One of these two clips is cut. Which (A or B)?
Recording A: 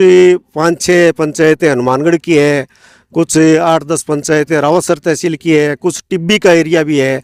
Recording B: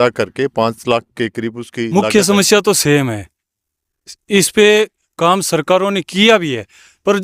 B